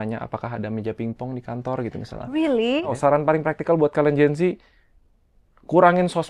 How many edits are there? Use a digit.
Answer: 1